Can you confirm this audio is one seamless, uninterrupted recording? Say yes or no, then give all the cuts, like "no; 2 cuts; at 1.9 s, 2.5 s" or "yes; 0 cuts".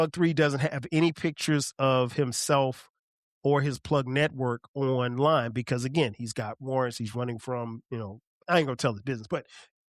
no; 1 cut; at 8.3 s